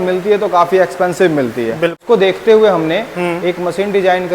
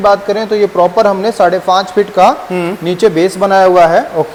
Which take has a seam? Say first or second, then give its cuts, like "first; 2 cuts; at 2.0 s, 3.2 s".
first; 1 cut; at 2.0 s